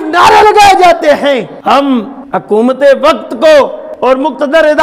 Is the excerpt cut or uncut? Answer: cut